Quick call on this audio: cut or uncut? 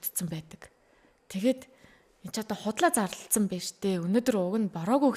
uncut